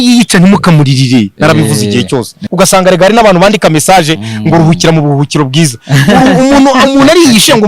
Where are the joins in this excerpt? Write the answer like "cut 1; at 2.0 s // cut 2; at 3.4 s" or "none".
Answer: cut 1; at 2.4 s